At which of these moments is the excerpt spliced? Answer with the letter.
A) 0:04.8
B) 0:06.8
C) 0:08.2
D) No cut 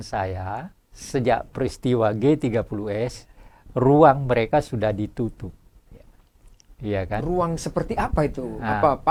D